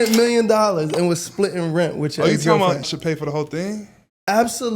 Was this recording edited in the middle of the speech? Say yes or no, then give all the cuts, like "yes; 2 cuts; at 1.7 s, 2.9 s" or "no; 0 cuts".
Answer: yes; 1 cut; at 2.9 s